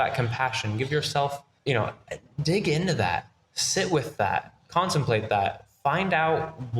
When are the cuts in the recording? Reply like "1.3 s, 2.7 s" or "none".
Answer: 1.5 s